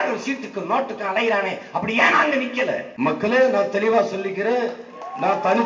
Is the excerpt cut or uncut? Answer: cut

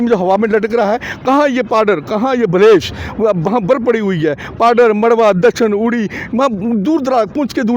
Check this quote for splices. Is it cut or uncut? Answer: cut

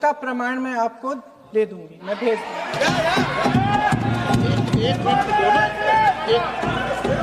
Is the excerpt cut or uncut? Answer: uncut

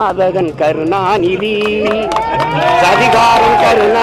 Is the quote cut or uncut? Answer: uncut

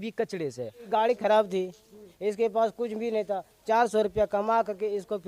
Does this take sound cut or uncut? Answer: cut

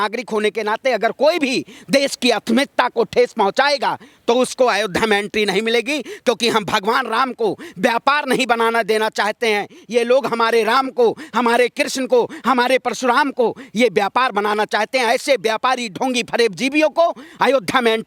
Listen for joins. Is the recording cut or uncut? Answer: uncut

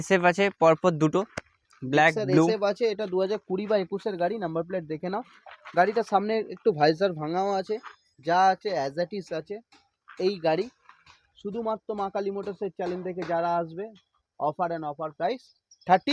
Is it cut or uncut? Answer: uncut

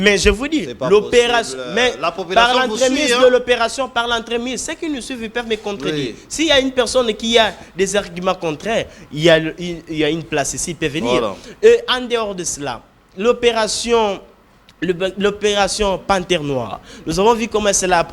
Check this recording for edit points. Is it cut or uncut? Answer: uncut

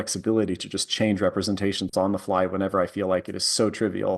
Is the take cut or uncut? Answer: uncut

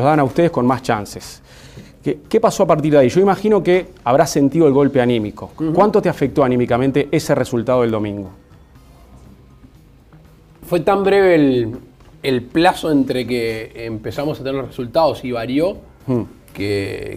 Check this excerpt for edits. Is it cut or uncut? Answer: cut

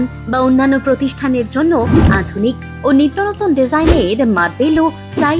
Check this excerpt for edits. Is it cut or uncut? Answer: uncut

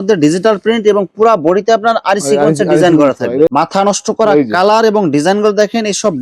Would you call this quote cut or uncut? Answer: cut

